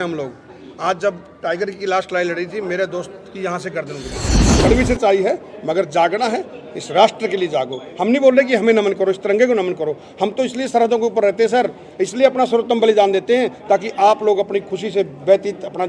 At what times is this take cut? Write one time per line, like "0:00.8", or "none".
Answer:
0:04.3